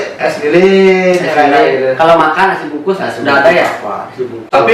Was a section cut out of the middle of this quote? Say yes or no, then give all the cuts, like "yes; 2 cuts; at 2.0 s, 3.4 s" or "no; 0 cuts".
no; 0 cuts